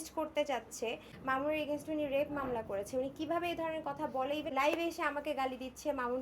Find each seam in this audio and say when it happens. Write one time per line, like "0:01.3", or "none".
0:01.1
0:04.5